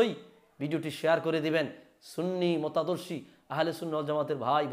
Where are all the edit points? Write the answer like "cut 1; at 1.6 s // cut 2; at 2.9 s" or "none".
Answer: none